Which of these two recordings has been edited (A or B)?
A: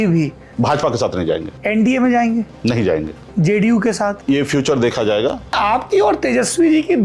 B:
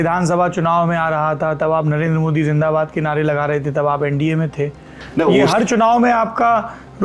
A